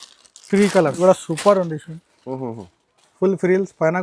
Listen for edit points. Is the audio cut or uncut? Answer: cut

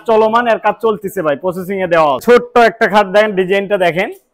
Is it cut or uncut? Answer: cut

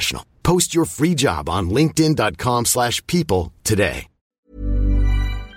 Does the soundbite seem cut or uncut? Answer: cut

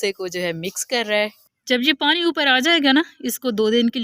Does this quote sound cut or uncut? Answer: cut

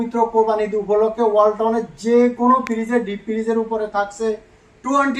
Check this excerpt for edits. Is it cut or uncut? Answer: uncut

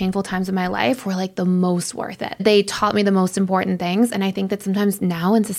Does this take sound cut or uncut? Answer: cut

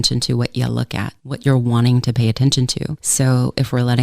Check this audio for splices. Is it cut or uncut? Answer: cut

